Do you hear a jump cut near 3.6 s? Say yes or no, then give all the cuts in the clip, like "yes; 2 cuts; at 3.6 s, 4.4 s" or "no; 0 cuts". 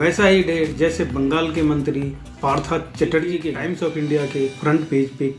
yes; 1 cut; at 3.6 s